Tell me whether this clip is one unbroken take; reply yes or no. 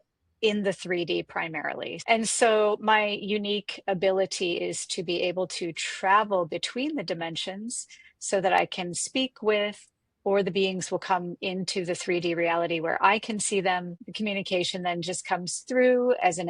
no